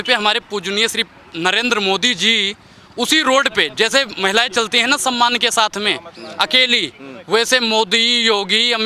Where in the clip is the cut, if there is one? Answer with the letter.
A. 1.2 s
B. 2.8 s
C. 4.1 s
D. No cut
D